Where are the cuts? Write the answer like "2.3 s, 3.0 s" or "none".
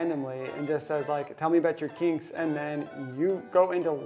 none